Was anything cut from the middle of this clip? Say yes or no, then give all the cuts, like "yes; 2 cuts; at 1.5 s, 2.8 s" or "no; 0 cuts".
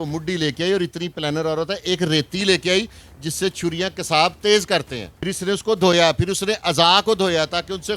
yes; 1 cut; at 5.3 s